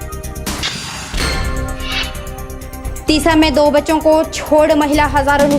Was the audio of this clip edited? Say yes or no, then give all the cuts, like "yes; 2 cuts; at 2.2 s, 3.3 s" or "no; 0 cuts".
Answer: yes; 1 cut; at 2.2 s